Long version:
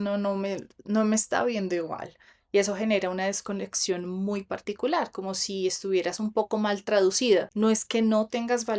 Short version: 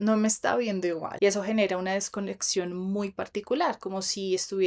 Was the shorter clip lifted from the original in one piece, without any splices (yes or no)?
no